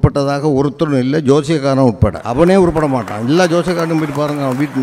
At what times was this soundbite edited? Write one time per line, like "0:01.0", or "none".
0:02.2